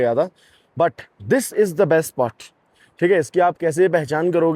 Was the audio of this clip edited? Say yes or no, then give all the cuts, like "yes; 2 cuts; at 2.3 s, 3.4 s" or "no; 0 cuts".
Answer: no; 0 cuts